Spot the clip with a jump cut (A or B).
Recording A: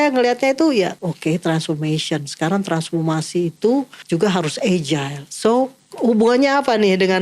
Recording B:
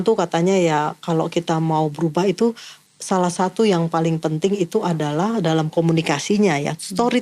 A